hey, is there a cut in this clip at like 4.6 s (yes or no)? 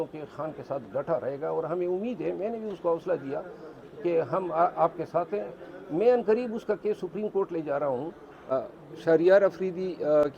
no